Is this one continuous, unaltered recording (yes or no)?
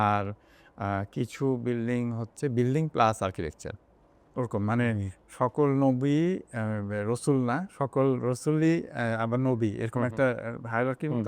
yes